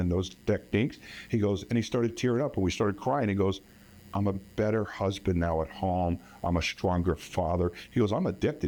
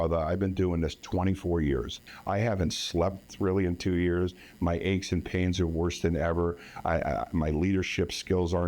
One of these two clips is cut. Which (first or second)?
second